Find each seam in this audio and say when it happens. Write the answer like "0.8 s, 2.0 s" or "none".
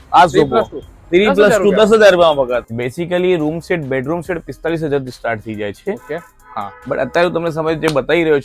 2.8 s